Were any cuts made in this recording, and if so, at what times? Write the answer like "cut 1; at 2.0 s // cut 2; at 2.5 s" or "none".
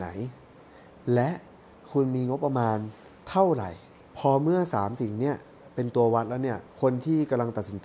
cut 1; at 4.0 s // cut 2; at 6.7 s